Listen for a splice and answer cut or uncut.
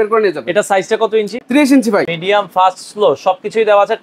cut